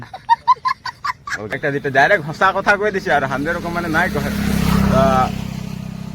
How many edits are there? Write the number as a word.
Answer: one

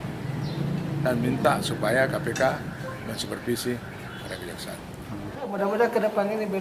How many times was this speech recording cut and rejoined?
one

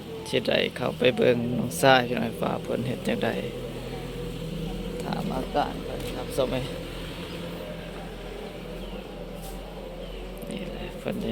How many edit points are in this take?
zero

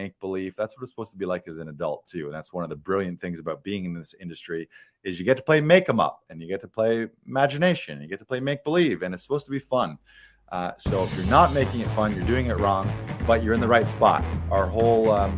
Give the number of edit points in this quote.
one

